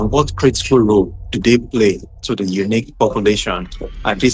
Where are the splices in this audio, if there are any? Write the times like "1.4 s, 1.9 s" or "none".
none